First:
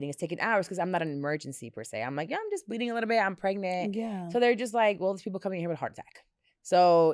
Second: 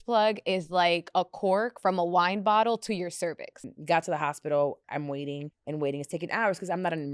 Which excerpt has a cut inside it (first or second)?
second